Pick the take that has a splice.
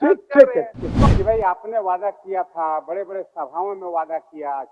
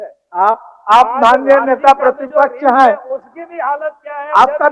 first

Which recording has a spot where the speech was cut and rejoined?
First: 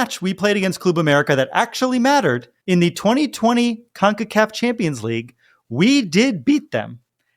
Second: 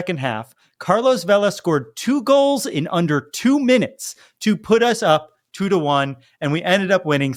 first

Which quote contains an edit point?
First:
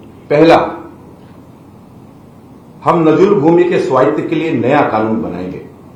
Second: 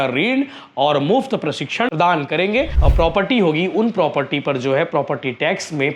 second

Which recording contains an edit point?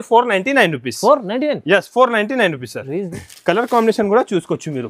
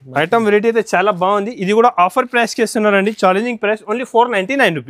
first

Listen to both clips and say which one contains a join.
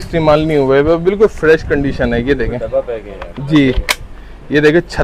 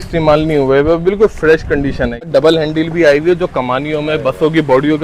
second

